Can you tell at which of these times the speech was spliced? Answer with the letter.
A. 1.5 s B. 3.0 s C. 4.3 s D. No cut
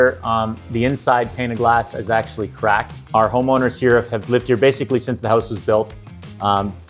D